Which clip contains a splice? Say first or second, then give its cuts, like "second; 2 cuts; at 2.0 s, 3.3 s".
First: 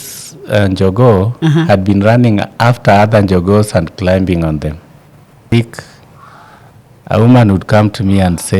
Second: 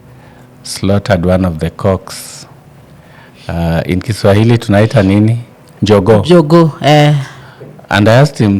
first; 1 cut; at 5.5 s